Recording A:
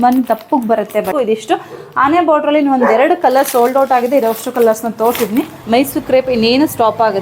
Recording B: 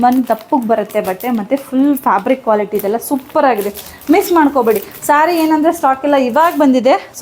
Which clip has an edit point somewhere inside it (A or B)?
A